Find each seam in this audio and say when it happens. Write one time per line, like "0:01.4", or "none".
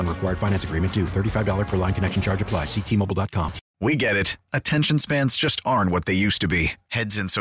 0:03.6

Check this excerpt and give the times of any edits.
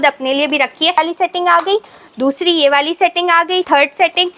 0:01.0
0:03.7

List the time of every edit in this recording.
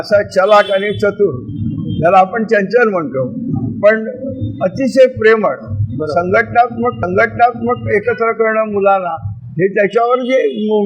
none

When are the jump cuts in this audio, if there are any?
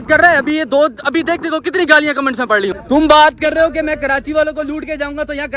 0:02.8

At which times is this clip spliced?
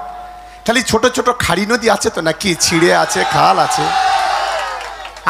none

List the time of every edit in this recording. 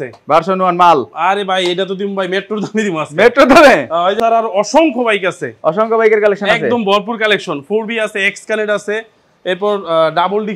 0:04.2

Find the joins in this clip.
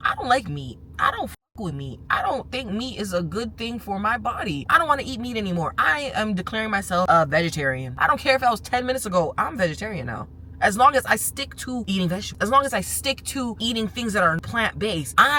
0:04.6
0:07.9

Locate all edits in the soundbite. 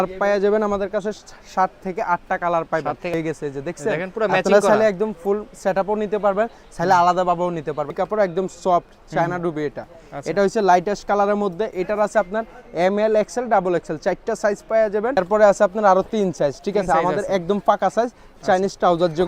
0:03.1
0:07.9
0:15.2

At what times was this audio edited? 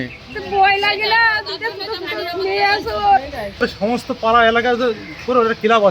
0:03.6

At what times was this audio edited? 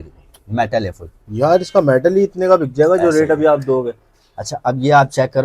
none

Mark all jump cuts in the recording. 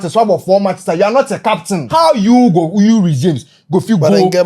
0:01.8

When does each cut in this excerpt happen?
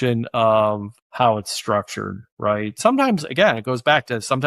0:02.8

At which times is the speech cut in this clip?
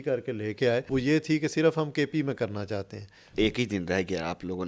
0:00.9
0:03.2

